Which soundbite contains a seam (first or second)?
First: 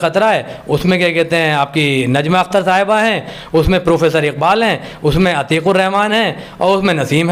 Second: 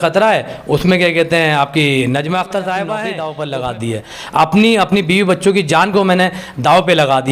second